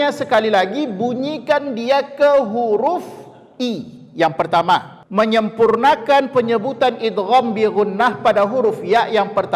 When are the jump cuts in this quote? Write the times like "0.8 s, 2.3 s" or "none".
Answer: 5.0 s